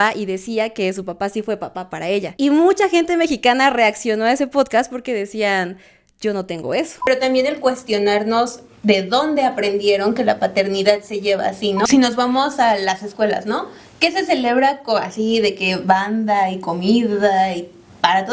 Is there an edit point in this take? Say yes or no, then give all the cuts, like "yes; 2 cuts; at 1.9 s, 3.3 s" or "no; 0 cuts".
yes; 3 cuts; at 2.3 s, 7.1 s, 11.9 s